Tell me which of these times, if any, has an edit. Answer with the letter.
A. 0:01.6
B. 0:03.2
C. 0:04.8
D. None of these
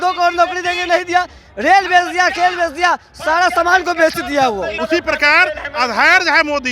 C